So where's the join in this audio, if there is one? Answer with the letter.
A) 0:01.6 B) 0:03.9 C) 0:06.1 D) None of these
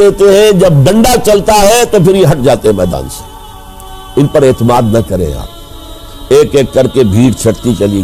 C